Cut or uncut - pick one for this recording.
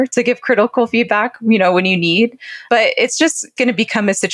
uncut